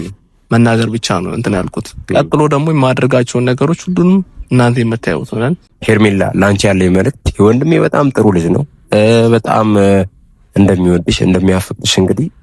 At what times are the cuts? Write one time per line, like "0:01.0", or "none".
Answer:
0:05.6